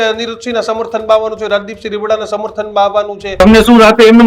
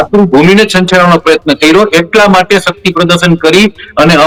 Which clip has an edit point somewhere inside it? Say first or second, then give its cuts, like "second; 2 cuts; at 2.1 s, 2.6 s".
first; 1 cut; at 3.3 s